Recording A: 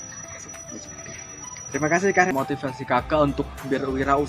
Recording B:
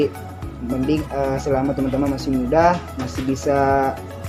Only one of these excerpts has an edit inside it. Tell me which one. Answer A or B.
A